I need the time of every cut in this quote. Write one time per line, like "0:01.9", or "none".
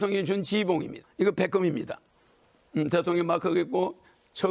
0:01.0